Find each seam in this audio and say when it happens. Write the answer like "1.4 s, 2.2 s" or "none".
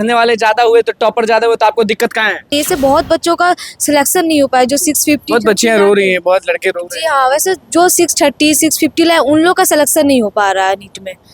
2.5 s